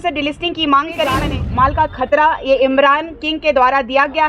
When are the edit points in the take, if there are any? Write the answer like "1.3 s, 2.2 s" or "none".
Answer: 1.4 s